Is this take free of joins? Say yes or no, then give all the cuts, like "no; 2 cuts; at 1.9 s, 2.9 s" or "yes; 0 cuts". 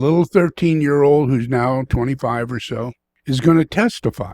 no; 1 cut; at 3.1 s